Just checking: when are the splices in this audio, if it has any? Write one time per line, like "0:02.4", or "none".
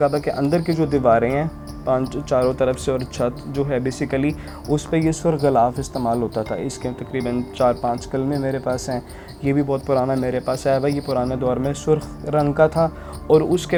none